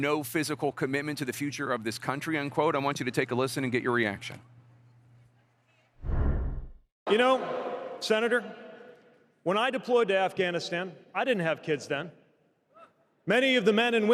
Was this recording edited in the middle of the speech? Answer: no; 0 cuts

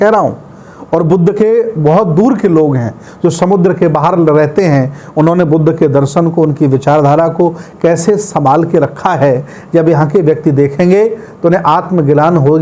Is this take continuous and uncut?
yes; 0 cuts

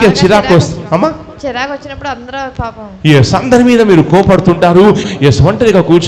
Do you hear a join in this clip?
yes; 1 cut; at 5.0 s

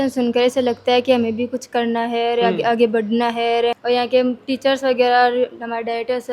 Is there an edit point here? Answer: no; 0 cuts

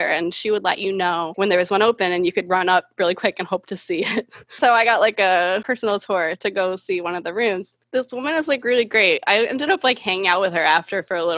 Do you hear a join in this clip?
yes; 3 cuts; at 1.3 s, 4.6 s, 7.7 s

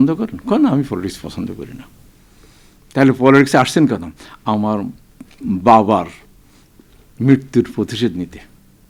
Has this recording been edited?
no; 0 cuts

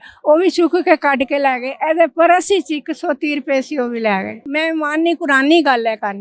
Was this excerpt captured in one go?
no; 1 cut; at 4.5 s

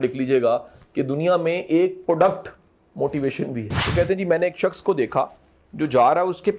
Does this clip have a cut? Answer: yes; 1 cut; at 3.8 s

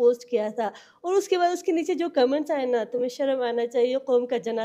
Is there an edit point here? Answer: no; 0 cuts

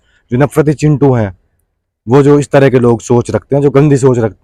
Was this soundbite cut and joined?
no; 0 cuts

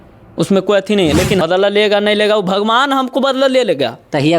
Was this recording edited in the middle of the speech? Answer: yes; 1 cut; at 1.4 s

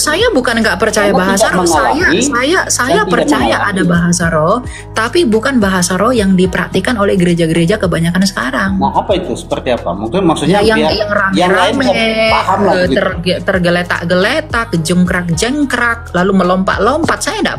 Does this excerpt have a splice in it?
no; 0 cuts

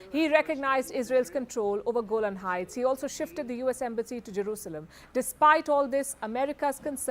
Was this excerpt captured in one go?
yes; 0 cuts

